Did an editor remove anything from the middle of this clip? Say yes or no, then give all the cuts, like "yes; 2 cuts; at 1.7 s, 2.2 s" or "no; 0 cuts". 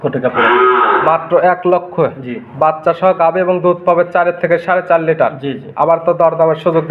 no; 0 cuts